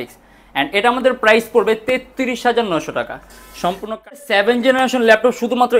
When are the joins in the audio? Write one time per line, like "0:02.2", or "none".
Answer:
0:04.2